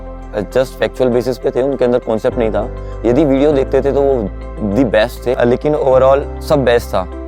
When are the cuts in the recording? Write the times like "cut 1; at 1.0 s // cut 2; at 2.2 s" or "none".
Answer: cut 1; at 5.4 s